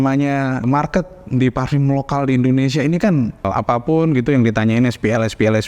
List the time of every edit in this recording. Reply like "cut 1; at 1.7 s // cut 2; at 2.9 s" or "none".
none

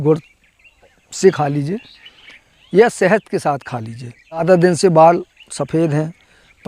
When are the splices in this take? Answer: cut 1; at 4.4 s

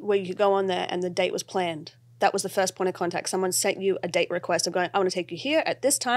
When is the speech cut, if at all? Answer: none

